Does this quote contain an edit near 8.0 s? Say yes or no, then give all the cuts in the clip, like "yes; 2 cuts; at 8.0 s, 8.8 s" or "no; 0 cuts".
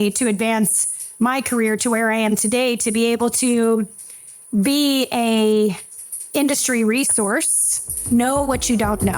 yes; 1 cut; at 8.0 s